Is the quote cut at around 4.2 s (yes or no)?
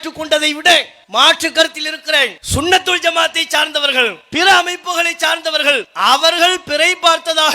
yes